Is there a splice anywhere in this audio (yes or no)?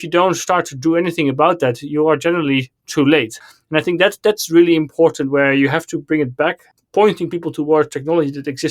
no